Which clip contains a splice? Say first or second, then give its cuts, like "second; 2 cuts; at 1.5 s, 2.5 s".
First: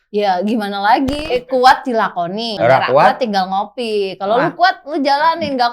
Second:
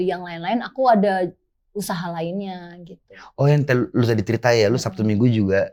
first; 2 cuts; at 1.2 s, 2.5 s